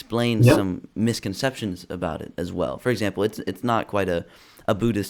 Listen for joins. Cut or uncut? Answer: uncut